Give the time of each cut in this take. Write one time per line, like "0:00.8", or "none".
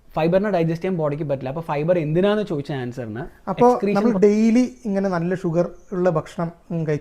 0:03.7